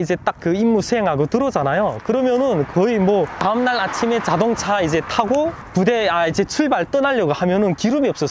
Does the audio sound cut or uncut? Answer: cut